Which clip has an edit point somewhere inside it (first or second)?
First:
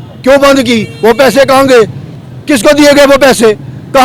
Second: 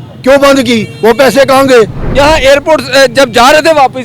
second